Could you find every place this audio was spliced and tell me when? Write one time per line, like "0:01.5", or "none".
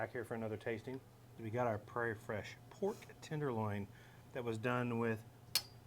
0:01.2

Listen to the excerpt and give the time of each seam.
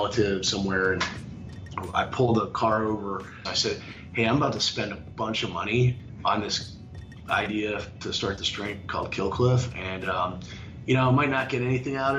0:03.5
0:06.0

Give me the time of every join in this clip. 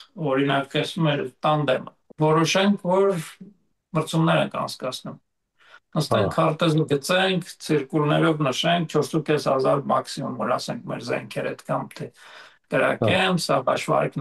0:02.0

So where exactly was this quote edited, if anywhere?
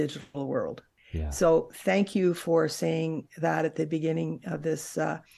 none

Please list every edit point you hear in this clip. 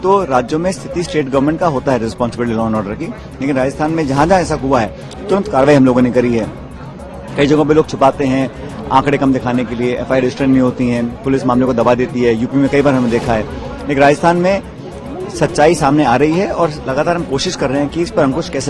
none

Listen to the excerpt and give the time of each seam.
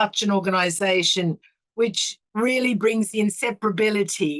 0:02.1

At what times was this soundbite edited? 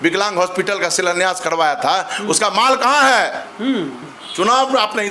0:04.0

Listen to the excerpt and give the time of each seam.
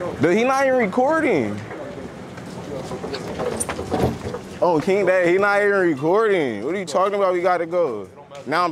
none

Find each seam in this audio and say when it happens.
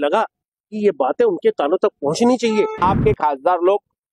0:02.8

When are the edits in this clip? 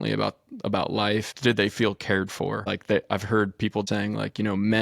0:01.3
0:02.7
0:03.9

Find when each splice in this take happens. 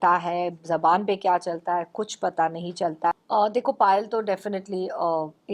0:03.1

